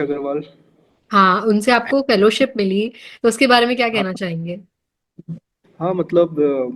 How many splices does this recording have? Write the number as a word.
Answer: zero